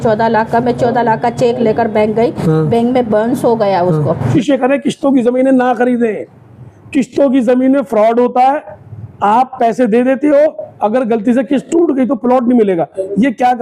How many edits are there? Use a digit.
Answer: 1